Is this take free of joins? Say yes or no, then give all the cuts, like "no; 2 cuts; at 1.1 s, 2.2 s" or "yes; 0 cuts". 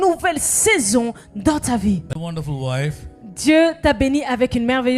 no; 1 cut; at 2.1 s